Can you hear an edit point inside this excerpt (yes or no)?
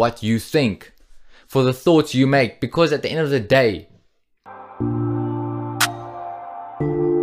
yes